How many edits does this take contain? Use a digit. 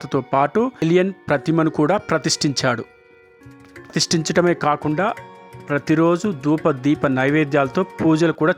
0